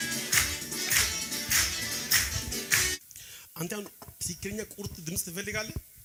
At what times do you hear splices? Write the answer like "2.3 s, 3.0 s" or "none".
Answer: none